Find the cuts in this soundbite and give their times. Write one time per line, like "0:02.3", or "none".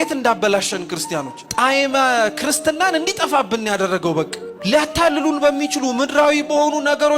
0:01.4
0:04.4